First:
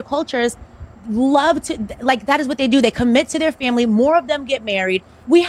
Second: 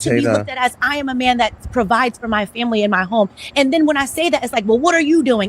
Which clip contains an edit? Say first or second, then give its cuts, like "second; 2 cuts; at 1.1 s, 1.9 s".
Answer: second; 1 cut; at 2.1 s